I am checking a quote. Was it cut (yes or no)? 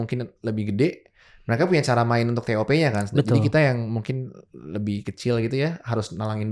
no